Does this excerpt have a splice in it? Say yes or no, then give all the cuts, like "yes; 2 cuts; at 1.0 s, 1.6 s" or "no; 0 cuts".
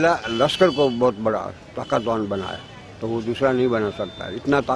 no; 0 cuts